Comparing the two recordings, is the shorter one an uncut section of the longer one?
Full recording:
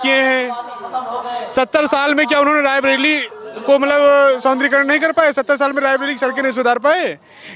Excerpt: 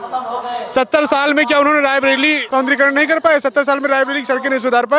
no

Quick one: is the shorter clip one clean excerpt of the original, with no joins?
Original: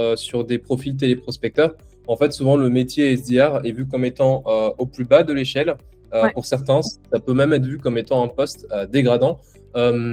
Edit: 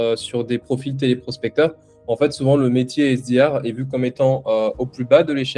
yes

